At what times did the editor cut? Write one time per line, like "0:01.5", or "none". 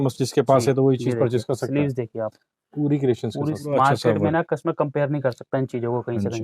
0:03.6